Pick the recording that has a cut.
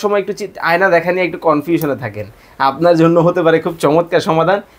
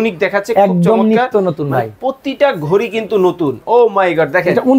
second; 1 cut; at 3.6 s

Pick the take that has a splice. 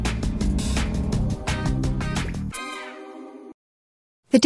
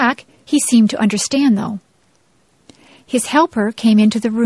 first; 1 cut; at 3.5 s

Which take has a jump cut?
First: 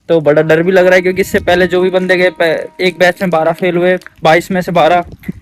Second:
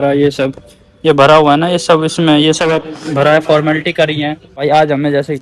second; 1 cut; at 4.5 s

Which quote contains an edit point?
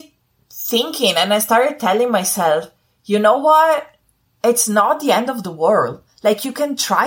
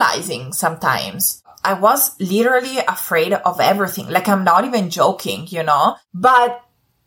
second; 2 cuts; at 1.5 s, 6.0 s

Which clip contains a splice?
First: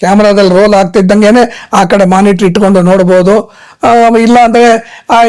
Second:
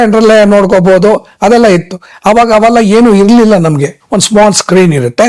second; 1 cut; at 4.0 s

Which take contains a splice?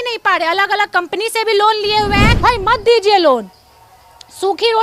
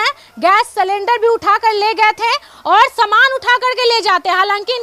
first; 1 cut; at 2.3 s

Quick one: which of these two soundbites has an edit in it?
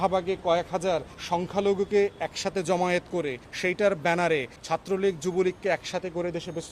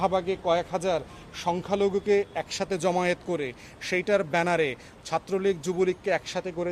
first; 3 cuts; at 1.1 s, 3.4 s, 4.5 s

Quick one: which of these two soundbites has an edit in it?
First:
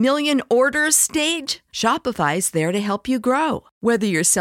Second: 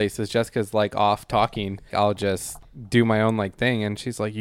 second; 2 cuts; at 1.9 s, 2.7 s

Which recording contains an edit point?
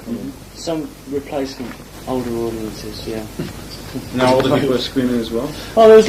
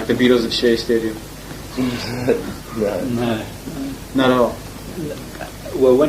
second; 1 cut; at 1.3 s

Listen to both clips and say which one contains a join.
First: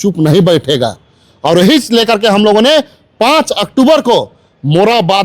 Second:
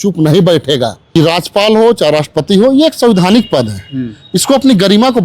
second; 1 cut; at 1.0 s

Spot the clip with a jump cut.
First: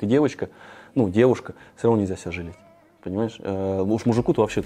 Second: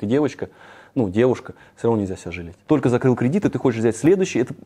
second; 1 cut; at 2.5 s

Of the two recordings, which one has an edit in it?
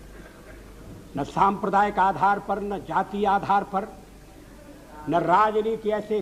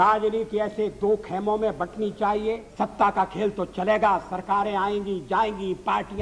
second; 1 cut; at 2.7 s

